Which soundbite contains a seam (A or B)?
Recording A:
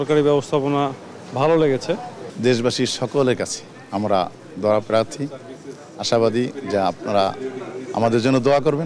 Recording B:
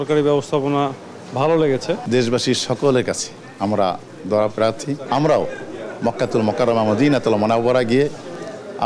B